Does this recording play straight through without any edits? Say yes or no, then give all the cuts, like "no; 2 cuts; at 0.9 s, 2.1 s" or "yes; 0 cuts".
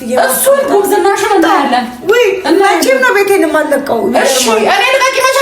yes; 0 cuts